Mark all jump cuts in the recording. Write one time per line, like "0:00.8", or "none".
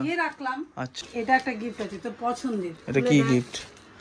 0:01.0